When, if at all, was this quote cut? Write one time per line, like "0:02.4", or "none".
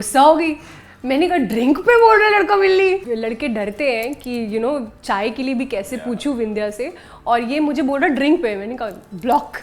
0:03.0